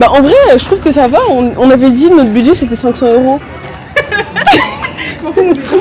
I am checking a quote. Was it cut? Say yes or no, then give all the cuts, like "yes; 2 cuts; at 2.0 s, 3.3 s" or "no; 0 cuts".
no; 0 cuts